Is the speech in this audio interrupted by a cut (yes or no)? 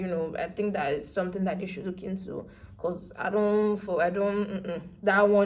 no